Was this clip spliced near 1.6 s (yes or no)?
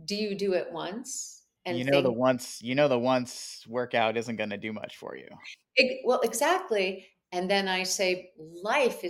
no